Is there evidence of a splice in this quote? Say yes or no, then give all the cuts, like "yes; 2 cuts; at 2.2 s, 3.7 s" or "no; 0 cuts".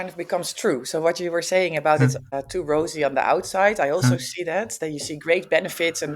yes; 1 cut; at 2.3 s